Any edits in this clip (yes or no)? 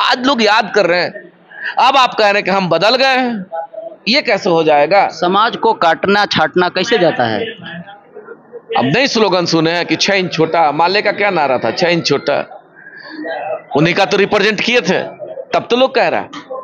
no